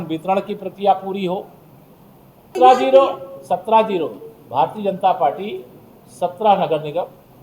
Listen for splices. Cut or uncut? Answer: cut